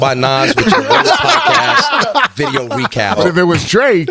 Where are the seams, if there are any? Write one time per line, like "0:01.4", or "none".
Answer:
0:03.2

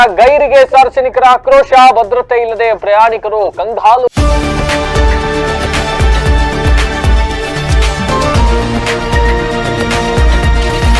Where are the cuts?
0:04.2

